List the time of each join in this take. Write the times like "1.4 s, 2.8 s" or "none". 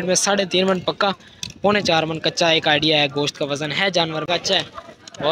4.3 s

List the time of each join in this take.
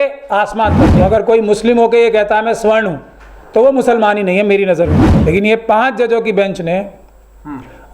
0.9 s, 5.1 s

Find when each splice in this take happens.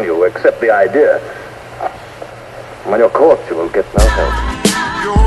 4.4 s

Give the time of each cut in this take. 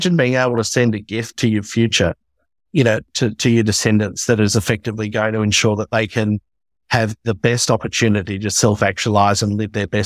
none

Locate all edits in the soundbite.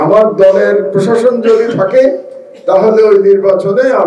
none

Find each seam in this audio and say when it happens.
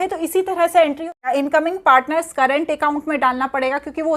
1.1 s

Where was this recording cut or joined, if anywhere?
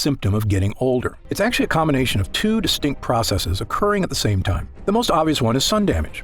1.2 s

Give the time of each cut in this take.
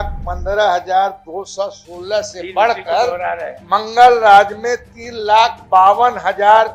none

